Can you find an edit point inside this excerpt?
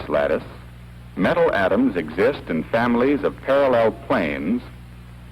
yes; 1 cut; at 2.4 s

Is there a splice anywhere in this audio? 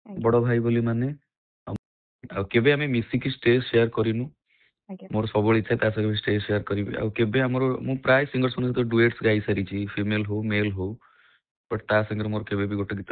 yes; 1 cut; at 1.7 s

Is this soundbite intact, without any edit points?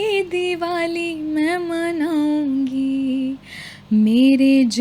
yes; 0 cuts

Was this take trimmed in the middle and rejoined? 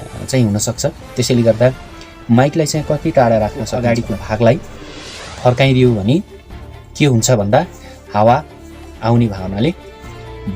yes; 1 cut; at 3.7 s

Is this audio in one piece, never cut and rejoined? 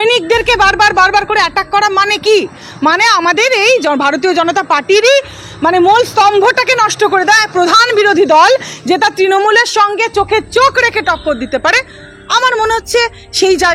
yes; 0 cuts

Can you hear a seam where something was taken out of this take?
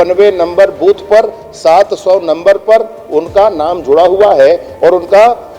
no; 0 cuts

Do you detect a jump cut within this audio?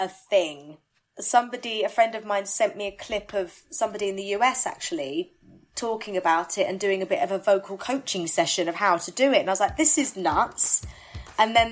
no; 0 cuts

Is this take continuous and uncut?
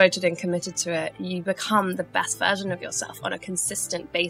yes; 0 cuts

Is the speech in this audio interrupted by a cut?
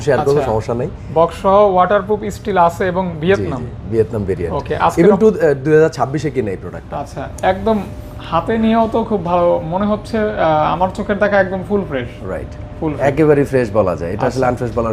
no; 0 cuts

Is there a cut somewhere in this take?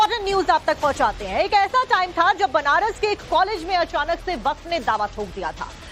yes; 1 cut; at 1.2 s

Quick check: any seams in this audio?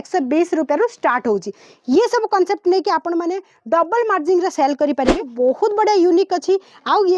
yes; 1 cut; at 5.3 s

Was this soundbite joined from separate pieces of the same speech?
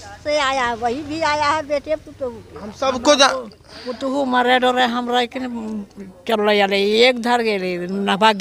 no; 0 cuts

